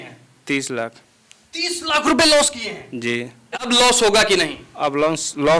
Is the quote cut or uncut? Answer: cut